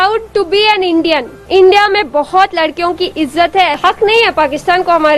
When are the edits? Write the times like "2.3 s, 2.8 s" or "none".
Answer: 1.4 s, 3.8 s